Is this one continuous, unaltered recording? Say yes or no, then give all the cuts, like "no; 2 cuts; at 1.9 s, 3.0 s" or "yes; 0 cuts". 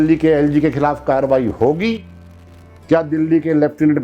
yes; 0 cuts